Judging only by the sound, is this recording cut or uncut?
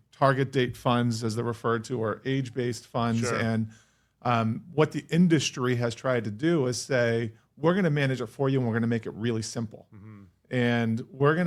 uncut